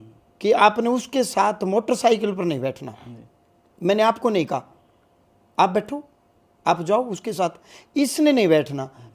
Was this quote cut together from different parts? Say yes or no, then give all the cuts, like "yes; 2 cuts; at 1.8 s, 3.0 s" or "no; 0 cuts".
no; 0 cuts